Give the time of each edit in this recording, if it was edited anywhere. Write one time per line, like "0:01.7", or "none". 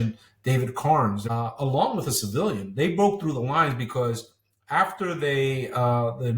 0:01.2